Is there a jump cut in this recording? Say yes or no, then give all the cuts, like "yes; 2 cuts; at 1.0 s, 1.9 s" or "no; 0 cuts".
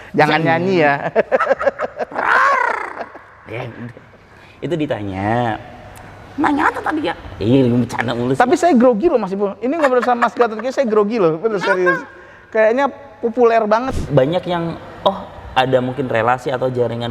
yes; 1 cut; at 13.9 s